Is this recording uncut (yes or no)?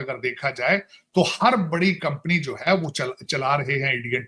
yes